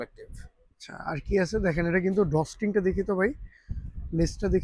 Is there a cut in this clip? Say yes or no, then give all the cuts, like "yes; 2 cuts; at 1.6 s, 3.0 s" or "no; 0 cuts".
no; 0 cuts